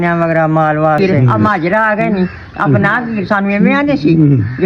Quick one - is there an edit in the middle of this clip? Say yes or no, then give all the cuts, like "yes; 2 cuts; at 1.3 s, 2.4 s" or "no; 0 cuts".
yes; 1 cut; at 1.0 s